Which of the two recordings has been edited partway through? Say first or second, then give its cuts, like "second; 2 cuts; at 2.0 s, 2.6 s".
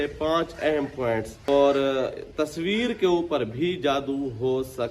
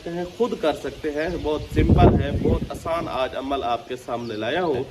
first; 1 cut; at 1.5 s